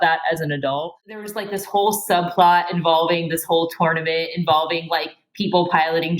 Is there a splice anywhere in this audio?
yes; 1 cut; at 1.2 s

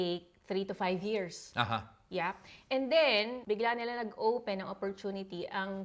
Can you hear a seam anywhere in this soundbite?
yes; 1 cut; at 3.4 s

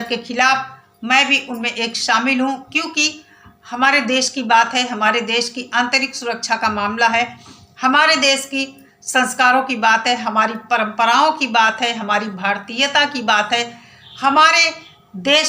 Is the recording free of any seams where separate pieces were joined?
yes; 0 cuts

